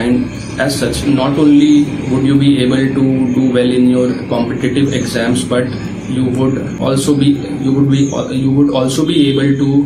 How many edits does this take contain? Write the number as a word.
two